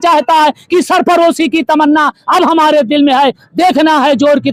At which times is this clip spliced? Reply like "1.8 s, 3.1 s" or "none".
none